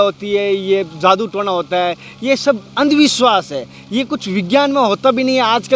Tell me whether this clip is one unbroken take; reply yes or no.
yes